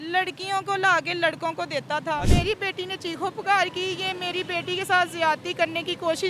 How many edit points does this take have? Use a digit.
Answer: 1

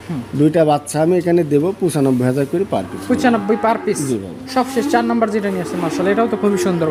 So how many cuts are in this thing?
0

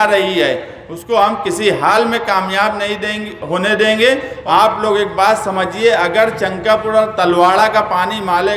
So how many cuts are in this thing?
1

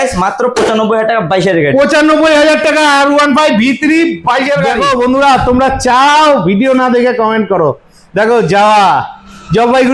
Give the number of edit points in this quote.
1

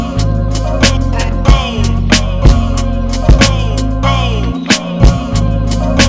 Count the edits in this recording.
0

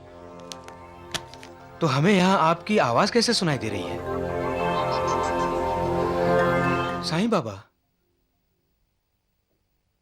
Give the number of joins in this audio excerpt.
1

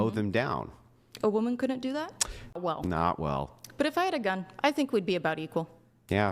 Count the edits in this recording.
1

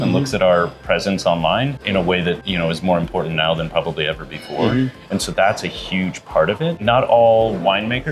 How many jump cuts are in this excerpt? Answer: 3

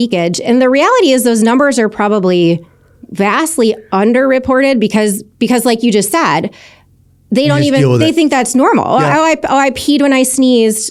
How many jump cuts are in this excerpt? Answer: 0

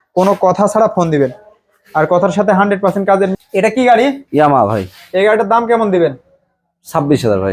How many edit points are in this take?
1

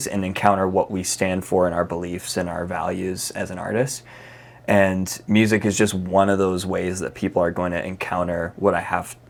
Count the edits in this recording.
0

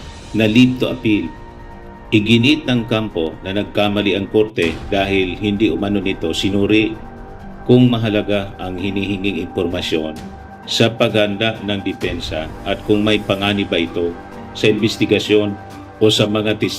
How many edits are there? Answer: 0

